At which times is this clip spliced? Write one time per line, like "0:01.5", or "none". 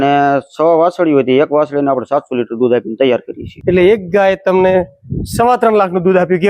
0:03.4